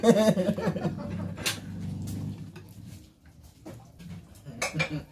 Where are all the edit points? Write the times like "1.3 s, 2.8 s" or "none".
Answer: 4.0 s